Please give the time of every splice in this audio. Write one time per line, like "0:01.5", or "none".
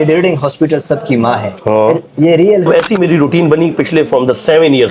0:02.7